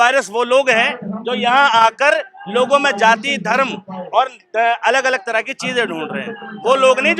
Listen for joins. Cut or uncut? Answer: uncut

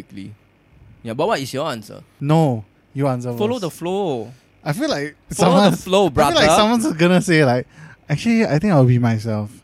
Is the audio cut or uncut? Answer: cut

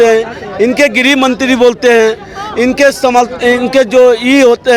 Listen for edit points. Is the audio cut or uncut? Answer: uncut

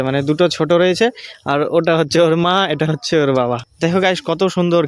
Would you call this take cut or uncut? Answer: cut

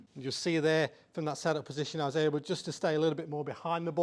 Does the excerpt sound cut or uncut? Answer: uncut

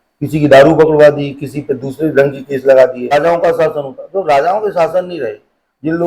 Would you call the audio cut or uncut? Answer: cut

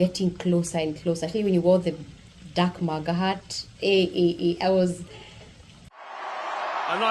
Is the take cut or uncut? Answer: uncut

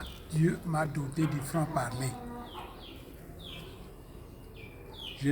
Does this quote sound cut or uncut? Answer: uncut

